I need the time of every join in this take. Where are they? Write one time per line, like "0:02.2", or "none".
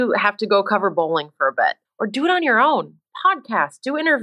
0:01.8